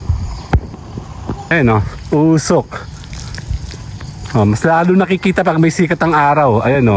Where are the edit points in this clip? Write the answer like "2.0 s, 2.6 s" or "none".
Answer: 1.5 s